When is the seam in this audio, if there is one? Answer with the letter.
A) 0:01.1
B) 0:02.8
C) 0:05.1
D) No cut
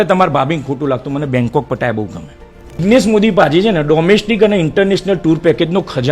B